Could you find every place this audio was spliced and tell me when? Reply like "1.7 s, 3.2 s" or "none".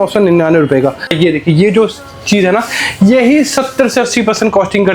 1.1 s